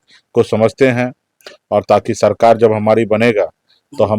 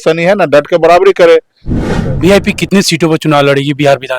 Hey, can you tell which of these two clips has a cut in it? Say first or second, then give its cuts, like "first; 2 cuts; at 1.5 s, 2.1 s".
second; 1 cut; at 1.8 s